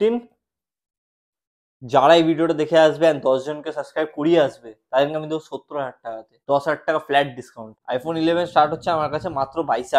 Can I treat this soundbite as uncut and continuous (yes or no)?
no